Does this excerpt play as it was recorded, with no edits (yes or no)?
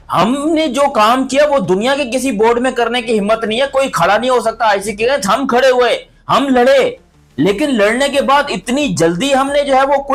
yes